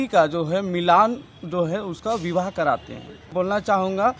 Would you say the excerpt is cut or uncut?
cut